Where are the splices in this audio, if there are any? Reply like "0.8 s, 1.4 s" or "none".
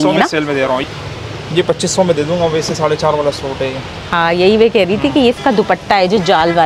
0.8 s, 5.4 s